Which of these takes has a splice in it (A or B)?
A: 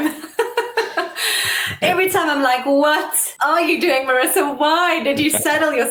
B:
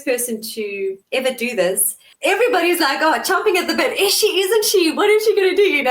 B